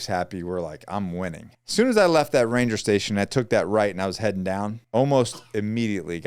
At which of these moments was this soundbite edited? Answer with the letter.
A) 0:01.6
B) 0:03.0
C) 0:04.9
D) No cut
A